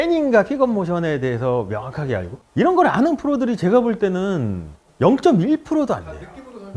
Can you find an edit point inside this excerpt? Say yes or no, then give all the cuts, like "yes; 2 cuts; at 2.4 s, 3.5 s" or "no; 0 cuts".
yes; 1 cut; at 2.3 s